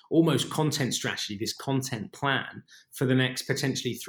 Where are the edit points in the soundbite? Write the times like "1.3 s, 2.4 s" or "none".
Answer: none